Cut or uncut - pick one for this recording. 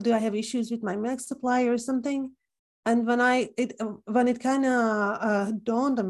uncut